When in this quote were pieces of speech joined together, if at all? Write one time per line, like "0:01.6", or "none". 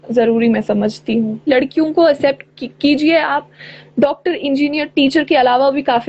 0:01.5